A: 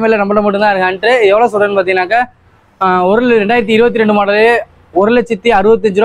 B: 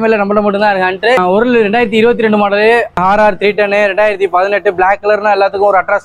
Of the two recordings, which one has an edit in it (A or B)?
B